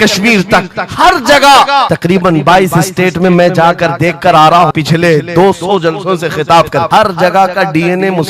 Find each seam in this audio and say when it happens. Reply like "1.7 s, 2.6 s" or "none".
1.9 s, 4.7 s, 6.9 s